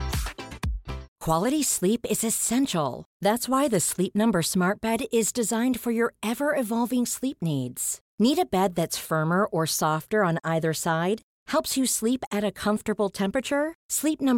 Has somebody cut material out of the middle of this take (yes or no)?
yes